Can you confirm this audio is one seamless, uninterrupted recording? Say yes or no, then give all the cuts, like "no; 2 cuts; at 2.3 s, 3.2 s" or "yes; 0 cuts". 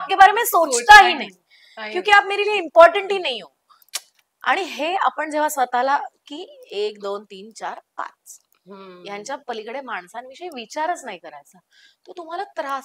yes; 0 cuts